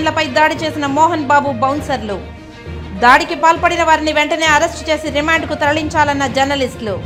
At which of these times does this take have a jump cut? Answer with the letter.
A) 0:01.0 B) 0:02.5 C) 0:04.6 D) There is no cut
D